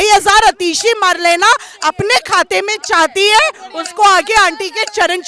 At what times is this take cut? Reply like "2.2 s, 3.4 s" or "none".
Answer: none

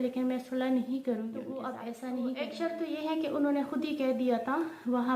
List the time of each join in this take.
1.7 s

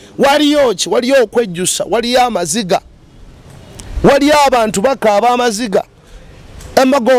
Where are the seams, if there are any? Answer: none

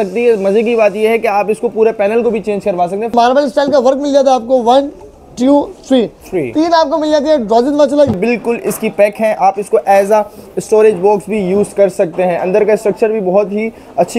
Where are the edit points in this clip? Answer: 3.1 s, 8.2 s

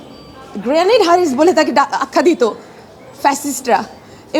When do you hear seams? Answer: none

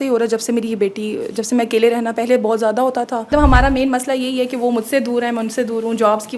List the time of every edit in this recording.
3.3 s

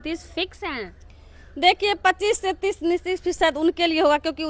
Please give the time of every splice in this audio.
none

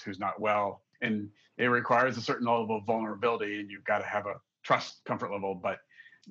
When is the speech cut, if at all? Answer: none

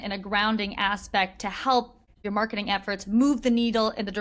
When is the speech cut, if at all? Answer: 2.0 s

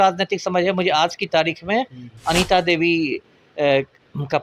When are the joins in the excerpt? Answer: none

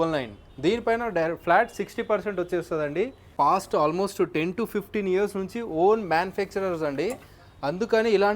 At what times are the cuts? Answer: 3.2 s

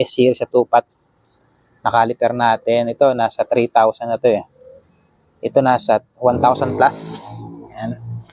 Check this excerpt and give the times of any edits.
none

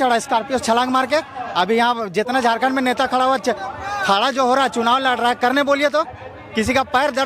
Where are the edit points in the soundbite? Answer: none

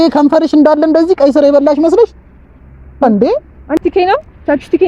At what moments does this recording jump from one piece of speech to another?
3.8 s

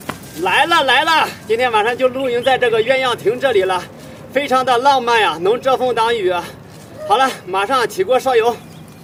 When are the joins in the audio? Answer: none

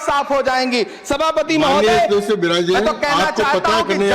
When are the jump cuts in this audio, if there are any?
none

